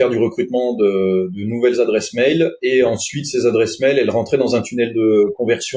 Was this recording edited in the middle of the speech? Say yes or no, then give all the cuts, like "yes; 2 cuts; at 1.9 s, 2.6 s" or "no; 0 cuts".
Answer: no; 0 cuts